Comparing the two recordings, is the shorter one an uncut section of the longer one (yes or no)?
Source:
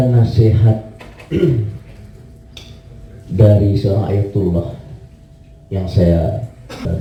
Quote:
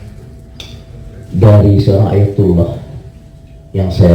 yes